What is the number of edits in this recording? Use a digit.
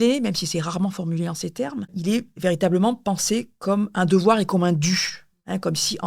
1